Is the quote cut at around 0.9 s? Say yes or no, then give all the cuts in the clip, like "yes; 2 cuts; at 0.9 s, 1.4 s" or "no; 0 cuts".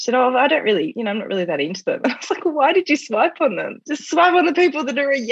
yes; 2 cuts; at 0.9 s, 3.7 s